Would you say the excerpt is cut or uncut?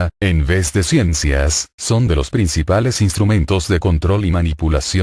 cut